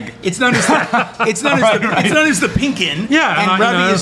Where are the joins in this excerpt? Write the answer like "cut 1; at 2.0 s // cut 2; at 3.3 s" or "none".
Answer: none